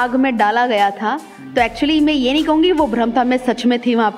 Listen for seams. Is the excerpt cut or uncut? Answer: uncut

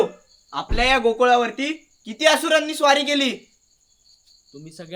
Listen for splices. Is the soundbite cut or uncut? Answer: uncut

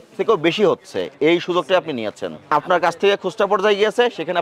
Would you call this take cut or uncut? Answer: cut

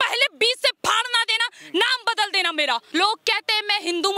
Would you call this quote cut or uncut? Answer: cut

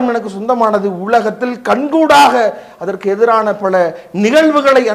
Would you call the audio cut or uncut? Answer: uncut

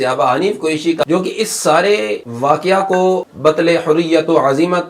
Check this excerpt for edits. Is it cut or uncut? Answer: cut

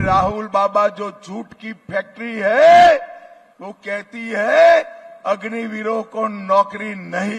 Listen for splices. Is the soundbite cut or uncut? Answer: uncut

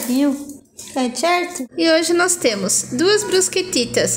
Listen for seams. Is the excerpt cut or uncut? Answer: cut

